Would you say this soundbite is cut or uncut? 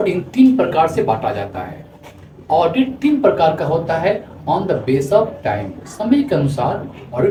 uncut